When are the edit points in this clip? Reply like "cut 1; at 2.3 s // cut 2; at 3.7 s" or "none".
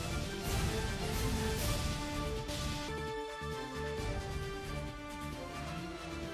none